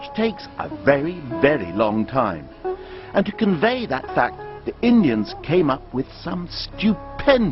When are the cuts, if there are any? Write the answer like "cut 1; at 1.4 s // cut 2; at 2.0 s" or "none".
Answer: cut 1; at 3.8 s